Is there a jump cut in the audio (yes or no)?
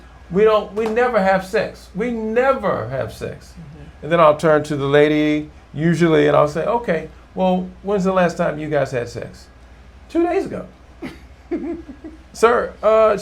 no